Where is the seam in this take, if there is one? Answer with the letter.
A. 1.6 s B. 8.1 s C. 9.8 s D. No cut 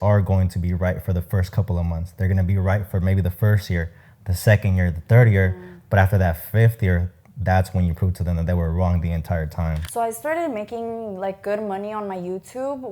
C